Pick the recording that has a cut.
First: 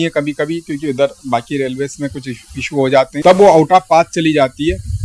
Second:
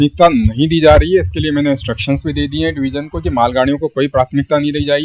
first; 1 cut; at 3.1 s

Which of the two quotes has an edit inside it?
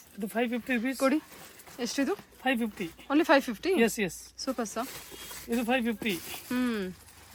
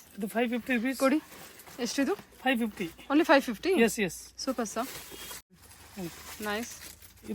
second; 1 cut; at 5.5 s

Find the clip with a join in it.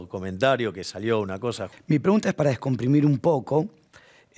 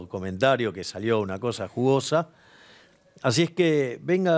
first; 1 cut; at 1.7 s

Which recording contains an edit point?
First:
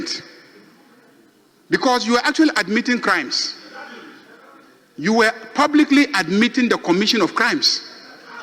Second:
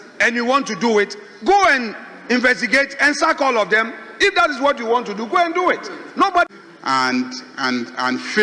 second; 1 cut; at 6.5 s

